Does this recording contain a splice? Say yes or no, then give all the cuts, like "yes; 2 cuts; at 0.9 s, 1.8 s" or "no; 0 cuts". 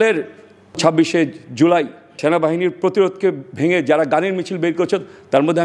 yes; 2 cuts; at 0.8 s, 2.2 s